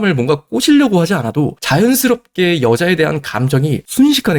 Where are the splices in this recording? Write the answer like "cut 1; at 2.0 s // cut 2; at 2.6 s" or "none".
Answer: none

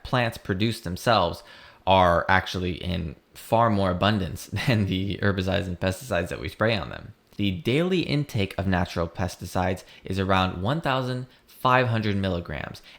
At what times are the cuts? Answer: cut 1; at 7.4 s

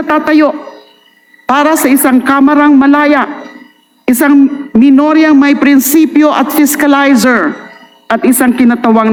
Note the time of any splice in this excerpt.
none

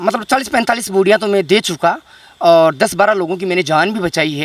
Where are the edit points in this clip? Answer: none

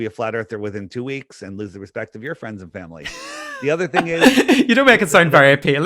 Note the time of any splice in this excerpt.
cut 1; at 4.1 s

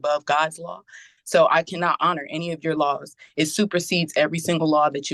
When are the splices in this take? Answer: none

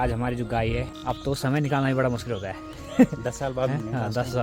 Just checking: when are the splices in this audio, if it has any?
cut 1; at 0.9 s

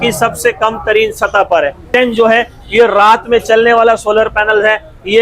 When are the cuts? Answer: cut 1; at 1.8 s

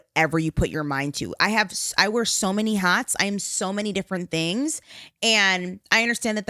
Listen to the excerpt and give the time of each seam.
none

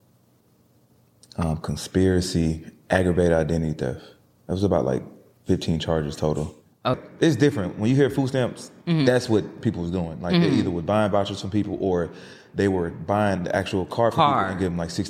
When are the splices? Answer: cut 1; at 7.0 s

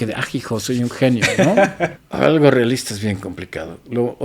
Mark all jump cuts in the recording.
cut 1; at 2.0 s

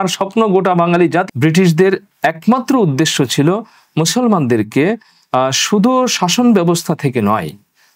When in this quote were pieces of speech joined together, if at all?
cut 1; at 1.3 s

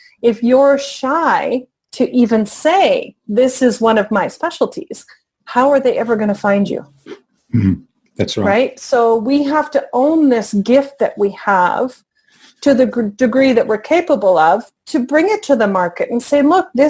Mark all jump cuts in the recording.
none

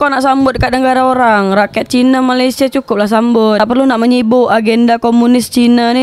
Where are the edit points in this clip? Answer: none

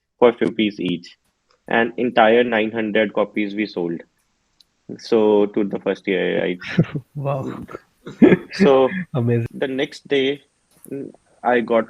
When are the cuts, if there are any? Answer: cut 1; at 9.5 s

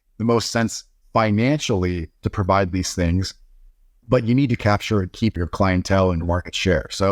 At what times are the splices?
cut 1; at 4.6 s // cut 2; at 6.2 s

